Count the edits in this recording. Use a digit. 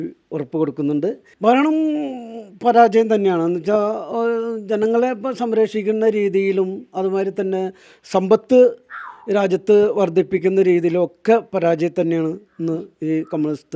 1